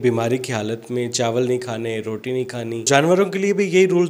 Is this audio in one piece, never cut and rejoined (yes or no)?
no